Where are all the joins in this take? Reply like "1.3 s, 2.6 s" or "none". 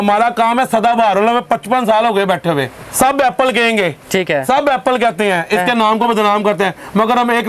2.8 s